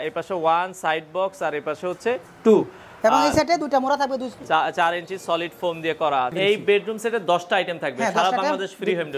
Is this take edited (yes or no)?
yes